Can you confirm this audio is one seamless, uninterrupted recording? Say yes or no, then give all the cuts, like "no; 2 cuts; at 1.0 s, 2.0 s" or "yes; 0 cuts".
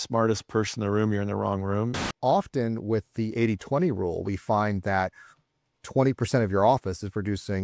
no; 1 cut; at 2.0 s